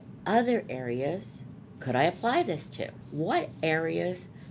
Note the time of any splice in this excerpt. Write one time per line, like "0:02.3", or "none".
0:03.0